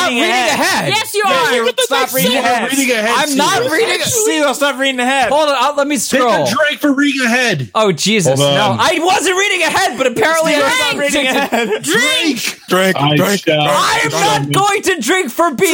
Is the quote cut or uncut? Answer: uncut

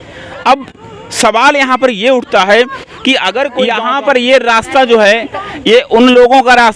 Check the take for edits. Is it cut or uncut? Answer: cut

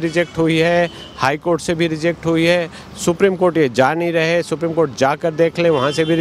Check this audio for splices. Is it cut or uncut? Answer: uncut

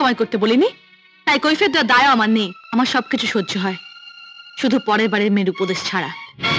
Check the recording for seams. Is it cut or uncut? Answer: cut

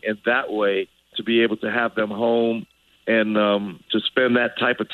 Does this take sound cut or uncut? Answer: cut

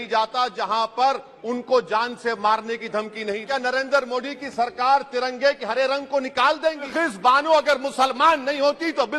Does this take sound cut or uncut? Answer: cut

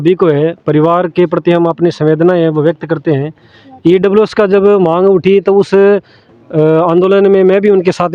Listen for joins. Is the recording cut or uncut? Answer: uncut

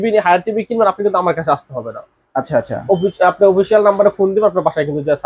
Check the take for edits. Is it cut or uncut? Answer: uncut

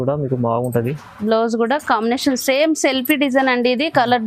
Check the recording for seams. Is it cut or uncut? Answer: uncut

